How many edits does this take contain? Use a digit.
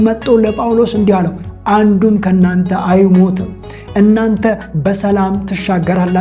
0